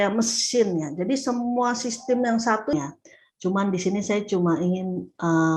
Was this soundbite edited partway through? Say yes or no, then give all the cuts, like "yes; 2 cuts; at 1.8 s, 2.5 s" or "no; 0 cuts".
yes; 1 cut; at 2.7 s